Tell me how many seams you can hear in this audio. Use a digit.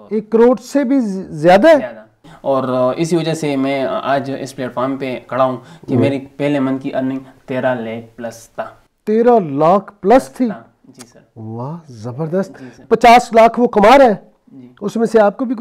2